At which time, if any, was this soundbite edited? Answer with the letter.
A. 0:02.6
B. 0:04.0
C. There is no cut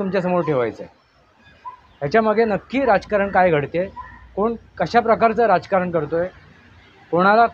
C